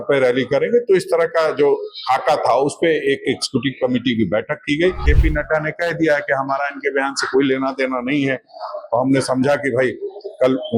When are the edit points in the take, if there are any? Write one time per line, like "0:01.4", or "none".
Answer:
0:05.1

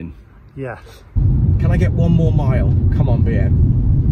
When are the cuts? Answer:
0:01.2

